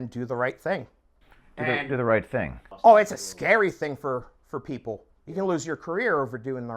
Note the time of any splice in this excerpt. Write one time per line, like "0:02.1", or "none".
0:01.0